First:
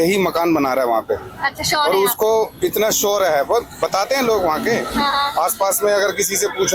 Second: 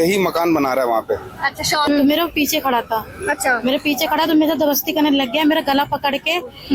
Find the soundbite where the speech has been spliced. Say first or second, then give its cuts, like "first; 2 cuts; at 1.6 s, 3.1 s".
second; 1 cut; at 1.9 s